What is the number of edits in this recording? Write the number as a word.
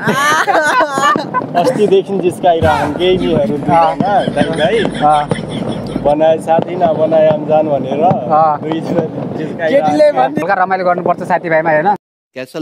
one